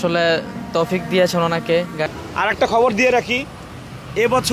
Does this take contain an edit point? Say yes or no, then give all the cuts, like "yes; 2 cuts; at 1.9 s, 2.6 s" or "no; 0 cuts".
yes; 1 cut; at 2.1 s